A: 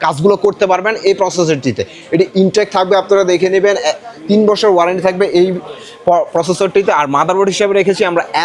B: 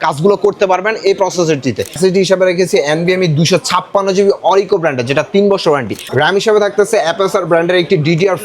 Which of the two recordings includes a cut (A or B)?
B